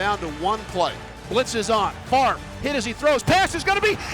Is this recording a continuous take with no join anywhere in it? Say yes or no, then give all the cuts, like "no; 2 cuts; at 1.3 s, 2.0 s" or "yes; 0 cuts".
no; 1 cut; at 1.2 s